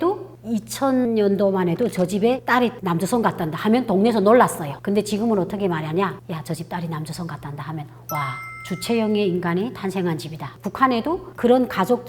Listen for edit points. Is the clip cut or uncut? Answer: cut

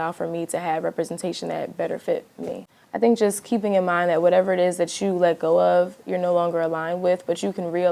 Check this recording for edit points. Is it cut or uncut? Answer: cut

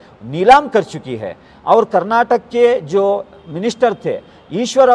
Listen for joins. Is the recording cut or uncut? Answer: uncut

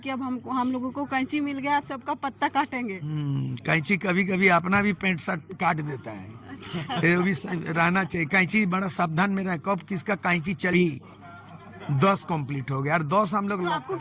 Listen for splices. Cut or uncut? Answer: cut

